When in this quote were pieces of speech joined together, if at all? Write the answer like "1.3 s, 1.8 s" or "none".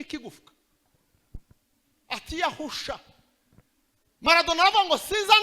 none